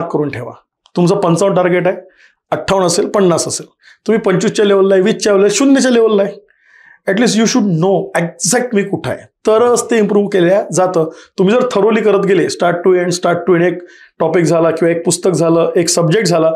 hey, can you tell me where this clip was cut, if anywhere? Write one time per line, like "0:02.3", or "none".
none